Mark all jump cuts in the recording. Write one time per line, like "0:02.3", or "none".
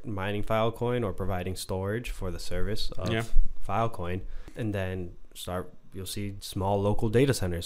0:04.4
0:06.4